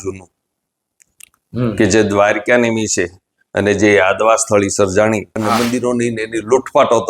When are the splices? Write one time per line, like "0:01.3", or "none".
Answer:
0:05.3